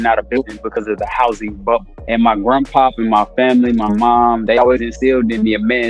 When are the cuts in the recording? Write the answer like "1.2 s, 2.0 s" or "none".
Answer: 1.9 s